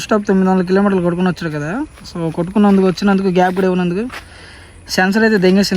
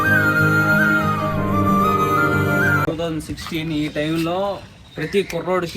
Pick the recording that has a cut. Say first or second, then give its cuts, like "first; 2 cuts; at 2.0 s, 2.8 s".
second; 1 cut; at 2.9 s